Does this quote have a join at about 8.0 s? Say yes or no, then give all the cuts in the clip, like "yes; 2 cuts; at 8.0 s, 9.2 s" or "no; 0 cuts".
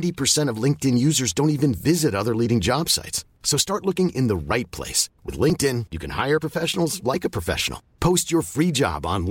no; 0 cuts